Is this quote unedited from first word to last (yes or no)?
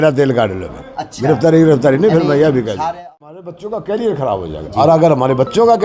no